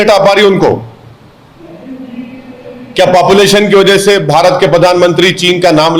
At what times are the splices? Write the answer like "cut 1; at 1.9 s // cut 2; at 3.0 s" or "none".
none